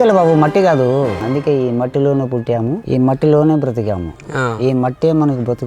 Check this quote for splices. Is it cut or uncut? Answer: cut